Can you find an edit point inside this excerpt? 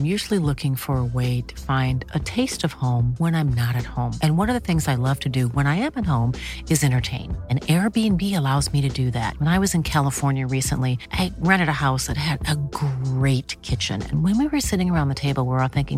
no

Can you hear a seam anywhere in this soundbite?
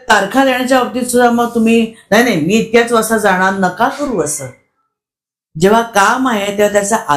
no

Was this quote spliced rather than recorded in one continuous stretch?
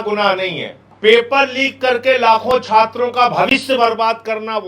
no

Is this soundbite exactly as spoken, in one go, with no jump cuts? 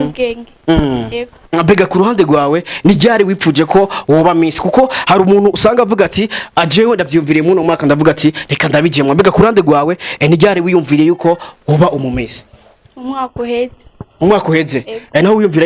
yes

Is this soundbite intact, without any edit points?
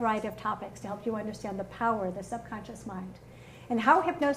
no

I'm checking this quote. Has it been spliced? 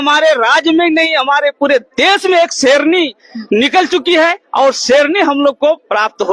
no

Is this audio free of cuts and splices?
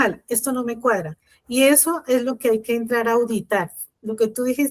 yes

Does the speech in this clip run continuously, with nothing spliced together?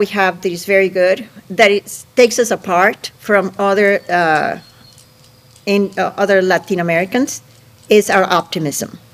yes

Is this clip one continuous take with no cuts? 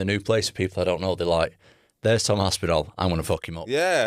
yes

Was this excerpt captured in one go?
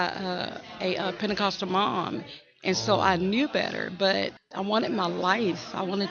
yes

